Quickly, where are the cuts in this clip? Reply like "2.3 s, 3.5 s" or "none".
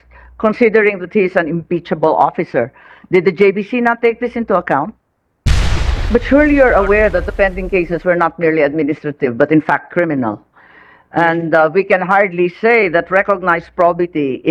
5.7 s